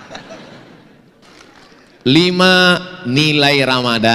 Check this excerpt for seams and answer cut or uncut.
cut